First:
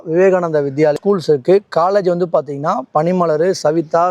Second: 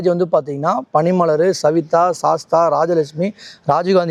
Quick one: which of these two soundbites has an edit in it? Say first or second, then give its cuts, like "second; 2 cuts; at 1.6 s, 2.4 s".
first; 1 cut; at 1.0 s